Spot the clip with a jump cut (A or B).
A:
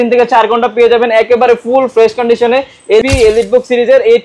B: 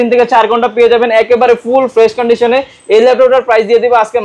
A